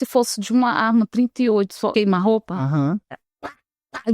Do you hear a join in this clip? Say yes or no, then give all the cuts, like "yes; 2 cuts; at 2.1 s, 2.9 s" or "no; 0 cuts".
yes; 1 cut; at 1.9 s